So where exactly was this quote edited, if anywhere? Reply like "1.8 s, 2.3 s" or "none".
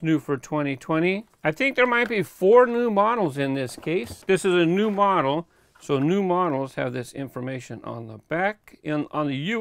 4.2 s